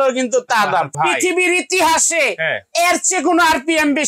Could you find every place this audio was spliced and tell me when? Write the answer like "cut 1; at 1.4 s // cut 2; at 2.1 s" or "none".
cut 1; at 1.0 s